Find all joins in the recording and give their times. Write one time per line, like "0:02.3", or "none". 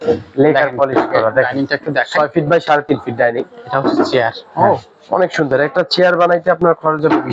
none